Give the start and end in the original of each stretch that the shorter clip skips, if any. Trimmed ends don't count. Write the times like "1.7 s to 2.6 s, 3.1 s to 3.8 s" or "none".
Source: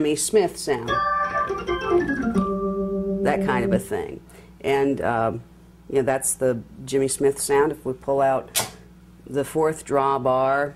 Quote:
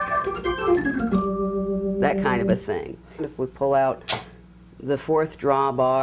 4.5 s to 7.8 s